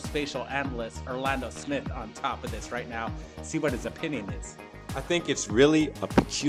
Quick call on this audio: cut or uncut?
uncut